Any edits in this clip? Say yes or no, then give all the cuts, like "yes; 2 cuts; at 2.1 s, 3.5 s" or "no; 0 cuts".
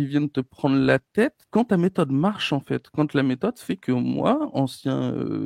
yes; 1 cut; at 1.4 s